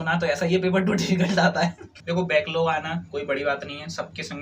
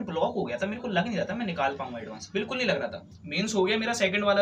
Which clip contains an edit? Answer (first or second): first